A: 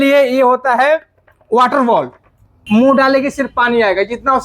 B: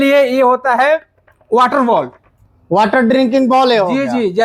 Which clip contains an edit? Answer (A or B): A